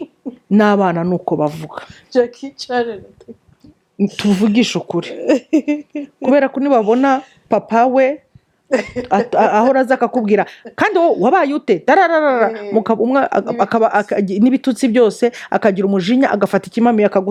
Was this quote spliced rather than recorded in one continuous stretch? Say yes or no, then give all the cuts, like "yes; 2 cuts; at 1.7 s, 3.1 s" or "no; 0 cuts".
no; 0 cuts